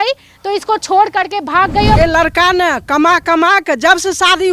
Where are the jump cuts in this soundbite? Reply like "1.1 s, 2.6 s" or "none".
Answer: 2.0 s